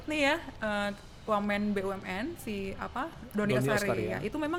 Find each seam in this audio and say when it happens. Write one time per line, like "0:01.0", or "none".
none